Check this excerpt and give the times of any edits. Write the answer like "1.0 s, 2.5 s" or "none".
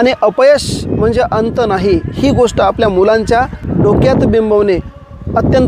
3.6 s